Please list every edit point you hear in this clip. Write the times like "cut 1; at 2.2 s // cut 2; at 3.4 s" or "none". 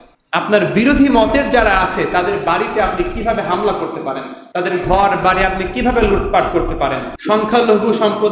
none